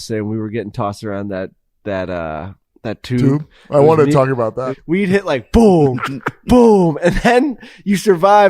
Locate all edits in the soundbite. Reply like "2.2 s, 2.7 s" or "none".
4.7 s